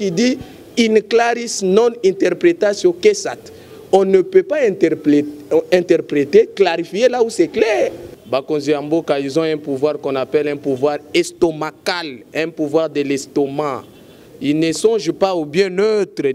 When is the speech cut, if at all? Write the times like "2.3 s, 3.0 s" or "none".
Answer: 8.1 s

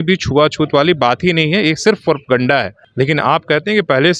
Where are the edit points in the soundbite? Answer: 2.8 s

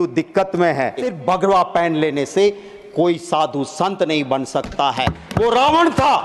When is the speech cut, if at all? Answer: 1.0 s

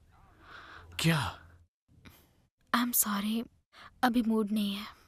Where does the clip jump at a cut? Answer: none

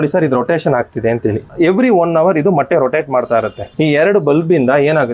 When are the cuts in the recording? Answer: 1.5 s, 3.6 s

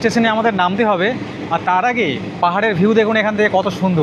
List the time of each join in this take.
none

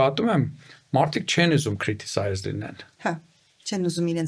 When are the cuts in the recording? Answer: none

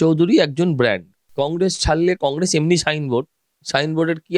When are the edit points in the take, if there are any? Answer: 1.2 s

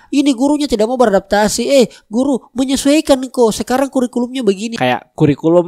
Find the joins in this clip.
4.7 s

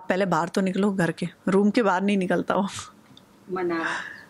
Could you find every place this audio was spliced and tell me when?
none

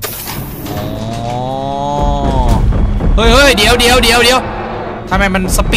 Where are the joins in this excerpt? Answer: none

